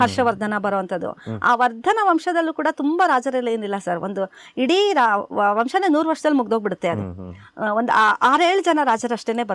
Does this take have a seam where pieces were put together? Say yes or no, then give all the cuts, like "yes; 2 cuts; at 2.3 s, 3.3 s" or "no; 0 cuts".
no; 0 cuts